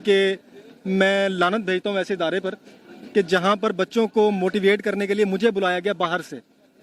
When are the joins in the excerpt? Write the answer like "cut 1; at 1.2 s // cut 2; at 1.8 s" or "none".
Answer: none